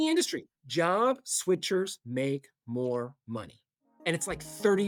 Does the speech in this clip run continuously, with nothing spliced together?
yes; 0 cuts

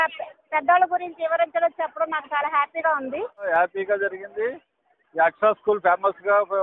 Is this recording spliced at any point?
yes; 1 cut; at 3.5 s

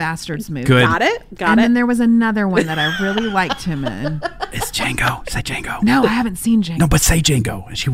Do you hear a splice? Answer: yes; 2 cuts; at 5.8 s, 6.7 s

